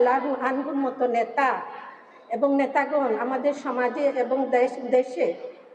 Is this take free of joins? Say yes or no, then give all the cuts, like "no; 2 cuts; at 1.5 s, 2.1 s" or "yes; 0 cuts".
yes; 0 cuts